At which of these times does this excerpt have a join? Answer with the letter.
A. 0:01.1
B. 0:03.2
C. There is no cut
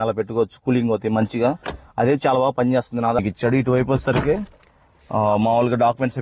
B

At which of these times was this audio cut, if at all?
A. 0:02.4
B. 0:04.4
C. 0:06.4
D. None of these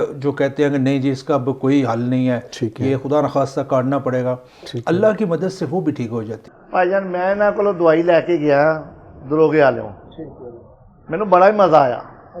C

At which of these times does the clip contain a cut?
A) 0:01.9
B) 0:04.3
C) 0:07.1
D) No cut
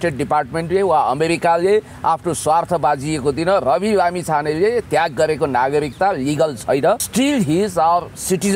C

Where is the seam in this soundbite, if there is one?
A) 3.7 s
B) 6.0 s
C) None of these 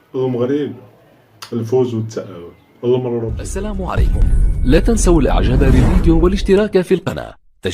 A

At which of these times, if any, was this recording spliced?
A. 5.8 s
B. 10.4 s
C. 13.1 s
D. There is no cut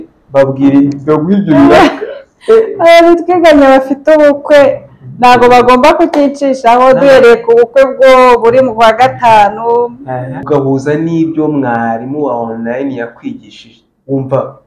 B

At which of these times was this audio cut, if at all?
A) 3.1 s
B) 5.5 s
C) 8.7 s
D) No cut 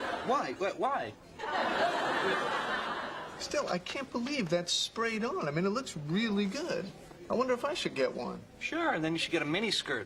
C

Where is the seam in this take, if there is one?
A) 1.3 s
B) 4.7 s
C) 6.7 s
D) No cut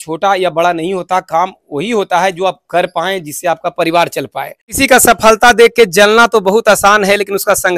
B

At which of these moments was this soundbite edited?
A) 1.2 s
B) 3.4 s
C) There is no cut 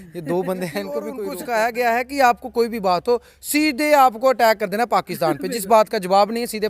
A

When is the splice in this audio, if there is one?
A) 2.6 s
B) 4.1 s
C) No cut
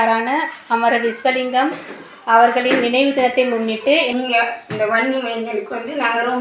B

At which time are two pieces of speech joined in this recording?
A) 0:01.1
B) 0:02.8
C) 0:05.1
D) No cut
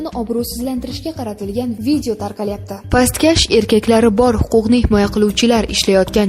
B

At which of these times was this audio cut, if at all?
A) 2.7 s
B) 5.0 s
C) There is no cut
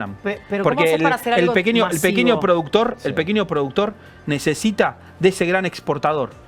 C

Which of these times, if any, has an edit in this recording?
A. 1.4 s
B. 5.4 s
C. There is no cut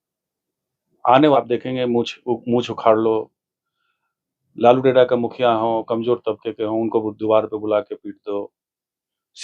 A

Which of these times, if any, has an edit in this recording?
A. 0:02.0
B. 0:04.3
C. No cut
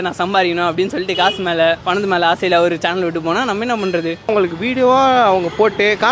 B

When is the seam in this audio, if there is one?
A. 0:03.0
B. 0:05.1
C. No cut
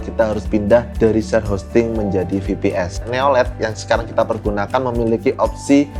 A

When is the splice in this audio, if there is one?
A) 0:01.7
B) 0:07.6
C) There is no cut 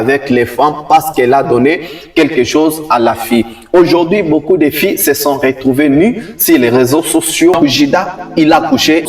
B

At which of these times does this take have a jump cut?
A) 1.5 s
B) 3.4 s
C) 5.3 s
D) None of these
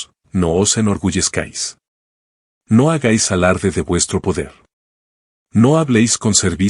D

